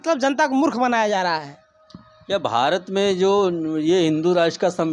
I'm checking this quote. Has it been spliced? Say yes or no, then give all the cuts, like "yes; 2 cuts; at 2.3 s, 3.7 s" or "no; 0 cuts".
no; 0 cuts